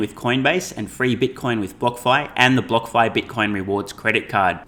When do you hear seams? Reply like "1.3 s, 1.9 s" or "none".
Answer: none